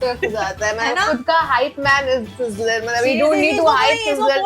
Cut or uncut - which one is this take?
uncut